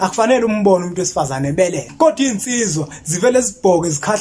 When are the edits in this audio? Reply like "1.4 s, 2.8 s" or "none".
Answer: 1.8 s